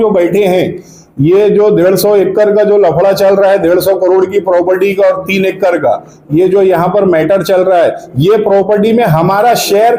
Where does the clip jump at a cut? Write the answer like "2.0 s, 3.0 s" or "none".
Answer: none